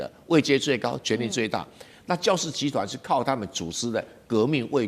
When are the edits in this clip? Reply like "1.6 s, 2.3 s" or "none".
none